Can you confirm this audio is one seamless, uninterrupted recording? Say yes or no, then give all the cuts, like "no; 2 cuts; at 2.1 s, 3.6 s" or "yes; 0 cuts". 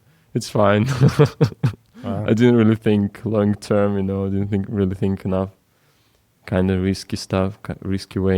yes; 0 cuts